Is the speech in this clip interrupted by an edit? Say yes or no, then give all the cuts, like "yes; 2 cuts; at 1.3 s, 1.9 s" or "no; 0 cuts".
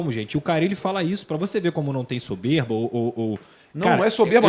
no; 0 cuts